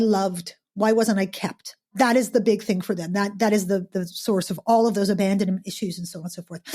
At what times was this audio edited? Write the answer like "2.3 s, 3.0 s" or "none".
1.9 s